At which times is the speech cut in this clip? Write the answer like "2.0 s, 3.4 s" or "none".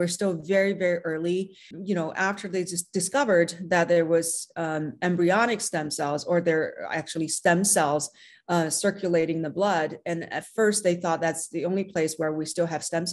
1.7 s